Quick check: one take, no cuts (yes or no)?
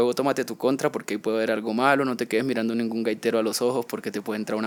yes